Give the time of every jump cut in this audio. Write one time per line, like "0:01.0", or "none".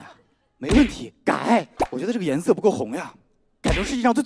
0:02.0